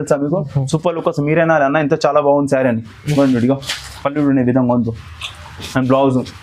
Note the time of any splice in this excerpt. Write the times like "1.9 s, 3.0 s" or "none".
none